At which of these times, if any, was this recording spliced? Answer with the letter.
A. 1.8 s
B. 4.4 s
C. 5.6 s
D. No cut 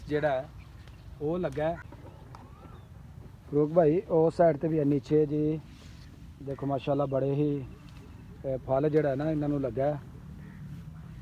A